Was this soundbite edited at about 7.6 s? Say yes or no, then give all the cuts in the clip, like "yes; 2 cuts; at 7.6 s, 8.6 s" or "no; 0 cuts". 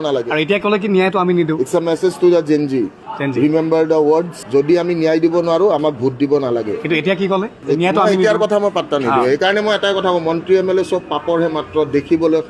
no; 0 cuts